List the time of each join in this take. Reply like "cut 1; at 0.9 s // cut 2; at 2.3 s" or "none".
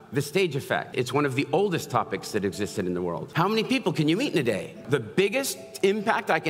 cut 1; at 0.9 s // cut 2; at 3.2 s // cut 3; at 4.8 s